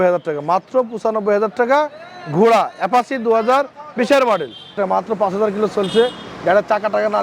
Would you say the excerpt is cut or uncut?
cut